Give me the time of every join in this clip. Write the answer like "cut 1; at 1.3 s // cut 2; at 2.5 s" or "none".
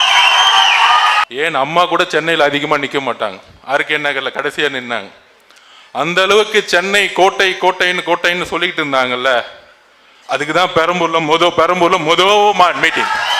cut 1; at 1.2 s